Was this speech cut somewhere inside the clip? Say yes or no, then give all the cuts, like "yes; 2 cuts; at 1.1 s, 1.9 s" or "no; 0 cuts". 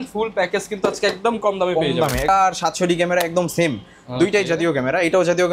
yes; 1 cut; at 2.3 s